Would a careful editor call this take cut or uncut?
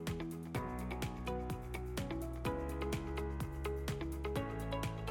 uncut